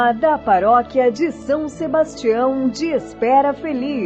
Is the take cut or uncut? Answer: uncut